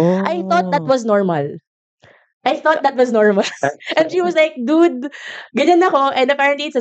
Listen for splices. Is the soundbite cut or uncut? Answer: uncut